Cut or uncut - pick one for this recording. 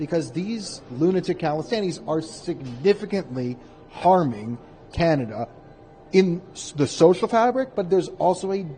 uncut